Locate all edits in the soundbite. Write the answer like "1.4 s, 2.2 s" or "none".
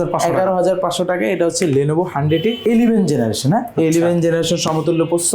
2.6 s